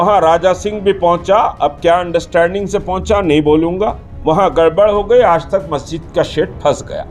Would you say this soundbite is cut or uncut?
cut